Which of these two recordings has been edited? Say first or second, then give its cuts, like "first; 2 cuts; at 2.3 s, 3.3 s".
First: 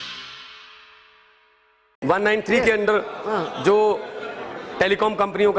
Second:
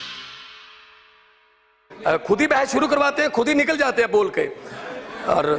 first; 1 cut; at 1.7 s